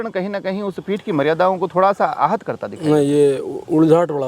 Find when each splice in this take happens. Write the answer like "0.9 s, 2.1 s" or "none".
none